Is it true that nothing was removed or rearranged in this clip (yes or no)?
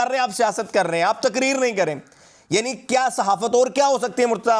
yes